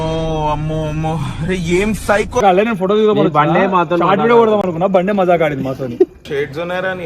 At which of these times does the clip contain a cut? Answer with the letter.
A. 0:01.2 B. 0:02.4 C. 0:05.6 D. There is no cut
B